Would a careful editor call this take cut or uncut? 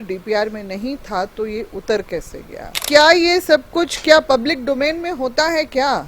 cut